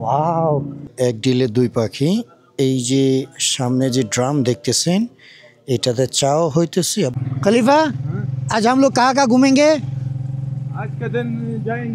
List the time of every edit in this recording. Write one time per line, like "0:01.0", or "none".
0:00.9
0:07.2